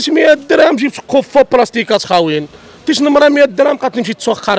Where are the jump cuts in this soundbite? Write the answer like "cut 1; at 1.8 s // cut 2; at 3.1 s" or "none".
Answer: none